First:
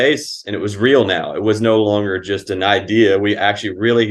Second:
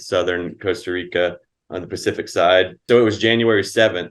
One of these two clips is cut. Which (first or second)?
second